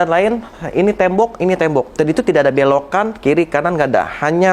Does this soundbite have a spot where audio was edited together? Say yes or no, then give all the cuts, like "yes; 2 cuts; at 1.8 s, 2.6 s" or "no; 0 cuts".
yes; 1 cut; at 1.9 s